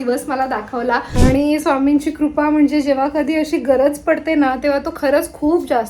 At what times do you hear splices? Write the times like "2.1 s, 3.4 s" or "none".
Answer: 1.1 s